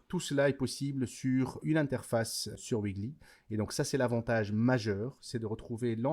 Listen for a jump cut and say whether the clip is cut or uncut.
cut